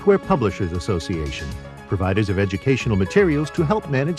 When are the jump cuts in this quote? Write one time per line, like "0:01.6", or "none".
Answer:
none